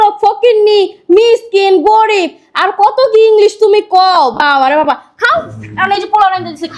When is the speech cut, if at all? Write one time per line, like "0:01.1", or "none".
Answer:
none

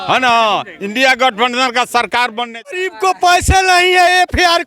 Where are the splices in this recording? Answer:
0:02.8

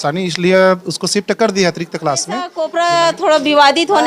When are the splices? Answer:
0:02.6

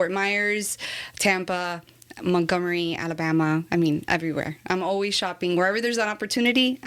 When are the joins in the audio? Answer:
none

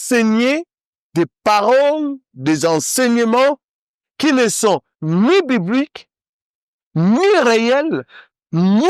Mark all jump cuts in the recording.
none

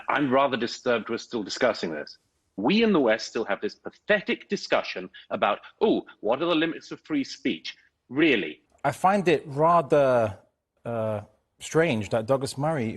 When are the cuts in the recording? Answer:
0:02.5
0:08.6

